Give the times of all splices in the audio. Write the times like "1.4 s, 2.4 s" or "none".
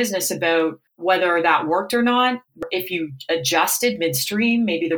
0.9 s, 2.6 s